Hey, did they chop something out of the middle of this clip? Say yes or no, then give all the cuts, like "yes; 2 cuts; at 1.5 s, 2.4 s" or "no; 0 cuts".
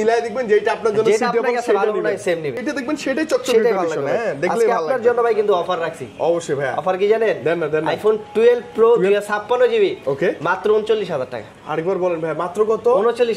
yes; 1 cut; at 2.6 s